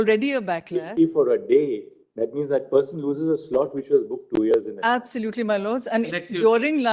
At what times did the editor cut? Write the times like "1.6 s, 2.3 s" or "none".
0.9 s